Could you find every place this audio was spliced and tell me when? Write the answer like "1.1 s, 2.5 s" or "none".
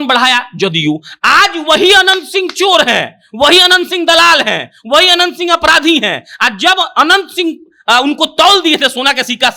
none